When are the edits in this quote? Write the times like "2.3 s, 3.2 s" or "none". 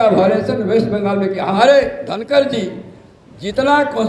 1.6 s